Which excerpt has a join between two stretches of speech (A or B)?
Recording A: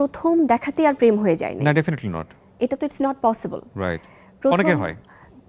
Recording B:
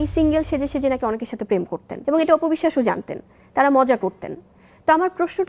B